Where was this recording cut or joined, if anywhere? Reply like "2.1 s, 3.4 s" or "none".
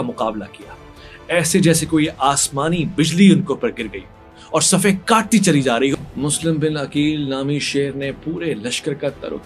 none